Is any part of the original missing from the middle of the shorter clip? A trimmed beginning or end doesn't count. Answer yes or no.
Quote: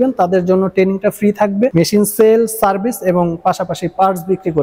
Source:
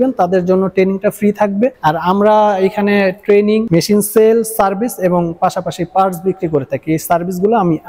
yes